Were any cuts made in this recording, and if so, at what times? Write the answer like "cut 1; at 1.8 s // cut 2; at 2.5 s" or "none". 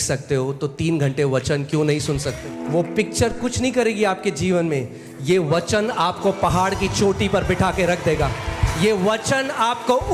cut 1; at 2.5 s